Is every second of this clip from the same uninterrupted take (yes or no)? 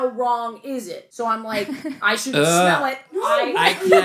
no